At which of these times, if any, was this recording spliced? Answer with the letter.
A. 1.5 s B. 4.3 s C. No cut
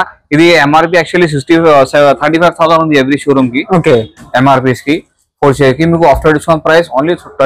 C